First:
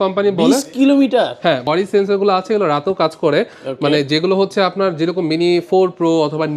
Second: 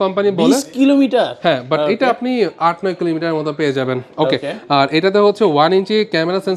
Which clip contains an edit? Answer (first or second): first